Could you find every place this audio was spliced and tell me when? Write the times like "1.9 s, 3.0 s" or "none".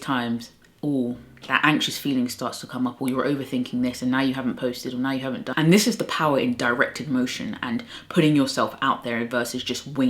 5.4 s